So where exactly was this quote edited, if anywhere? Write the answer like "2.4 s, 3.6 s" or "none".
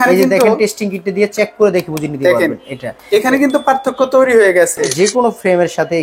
4.9 s